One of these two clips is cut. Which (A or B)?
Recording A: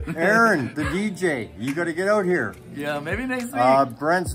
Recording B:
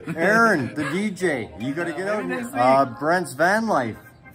B